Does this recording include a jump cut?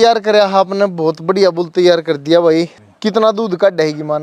yes; 1 cut; at 2.8 s

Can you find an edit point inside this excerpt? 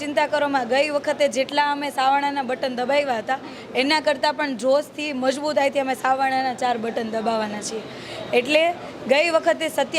no; 0 cuts

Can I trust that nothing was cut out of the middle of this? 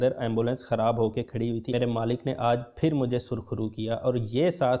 no; 1 cut; at 1.7 s

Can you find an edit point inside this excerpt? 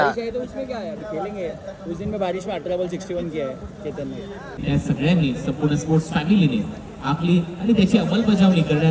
yes; 1 cut; at 4.6 s

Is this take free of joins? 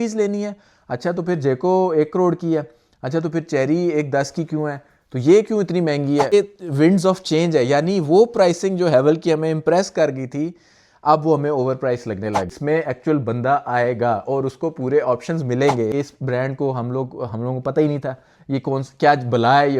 no; 3 cuts; at 6.3 s, 12.5 s, 15.9 s

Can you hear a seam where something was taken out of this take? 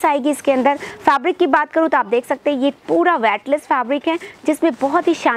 no; 0 cuts

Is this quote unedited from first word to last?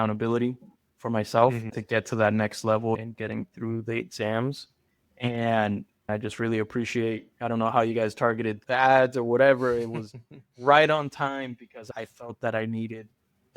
no; 5 cuts; at 1.7 s, 3.0 s, 6.1 s, 8.6 s, 11.8 s

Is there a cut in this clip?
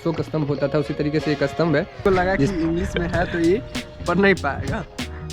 yes; 1 cut; at 2.0 s

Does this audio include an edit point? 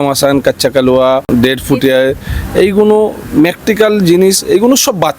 yes; 1 cut; at 1.3 s

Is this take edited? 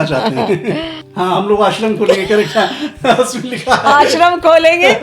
yes; 1 cut; at 1.0 s

